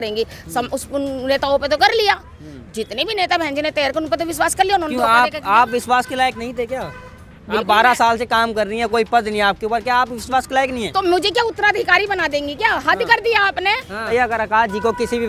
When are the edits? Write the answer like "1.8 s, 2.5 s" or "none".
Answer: 14.1 s